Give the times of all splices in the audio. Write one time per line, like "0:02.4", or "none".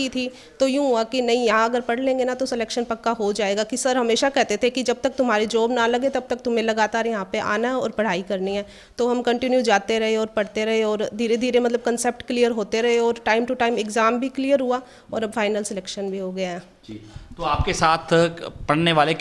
none